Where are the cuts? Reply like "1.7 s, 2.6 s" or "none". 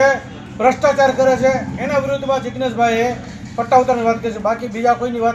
none